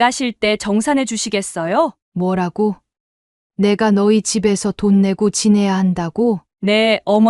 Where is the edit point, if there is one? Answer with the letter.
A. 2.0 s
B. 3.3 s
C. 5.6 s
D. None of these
A